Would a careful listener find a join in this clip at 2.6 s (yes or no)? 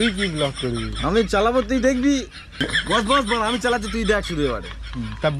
yes